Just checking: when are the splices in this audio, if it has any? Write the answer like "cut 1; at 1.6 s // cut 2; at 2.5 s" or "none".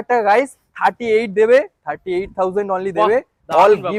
none